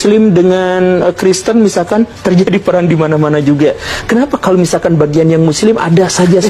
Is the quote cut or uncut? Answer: uncut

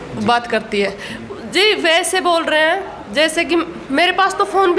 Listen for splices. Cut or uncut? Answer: uncut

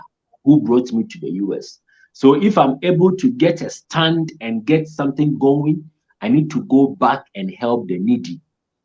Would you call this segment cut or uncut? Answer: uncut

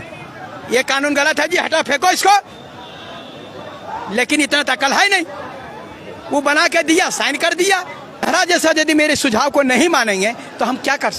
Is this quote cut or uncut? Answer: uncut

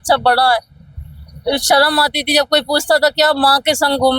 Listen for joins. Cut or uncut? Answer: uncut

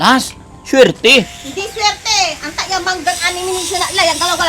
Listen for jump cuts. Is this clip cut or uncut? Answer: uncut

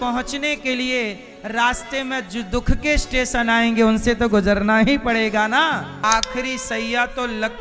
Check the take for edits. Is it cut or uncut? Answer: cut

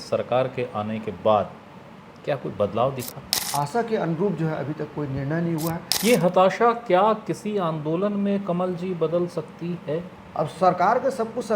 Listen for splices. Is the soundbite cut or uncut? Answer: cut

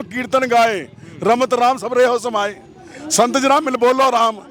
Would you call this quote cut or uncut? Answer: uncut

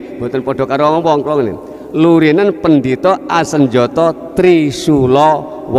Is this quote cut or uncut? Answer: uncut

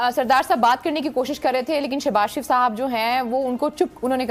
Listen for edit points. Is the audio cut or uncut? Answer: uncut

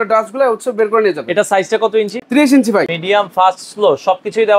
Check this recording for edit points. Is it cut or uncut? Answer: cut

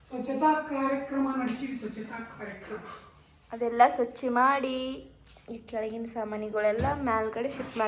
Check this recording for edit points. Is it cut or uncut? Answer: uncut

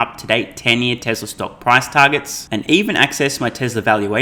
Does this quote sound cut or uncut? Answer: uncut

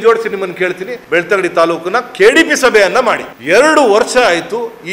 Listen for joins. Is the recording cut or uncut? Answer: cut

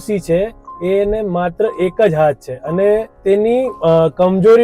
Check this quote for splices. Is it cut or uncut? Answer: cut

